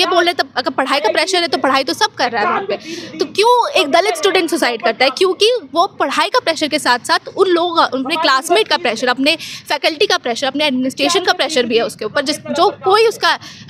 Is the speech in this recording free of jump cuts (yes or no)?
yes